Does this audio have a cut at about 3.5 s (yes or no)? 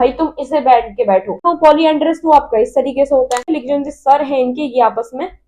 yes